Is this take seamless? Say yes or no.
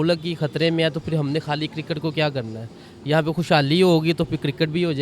yes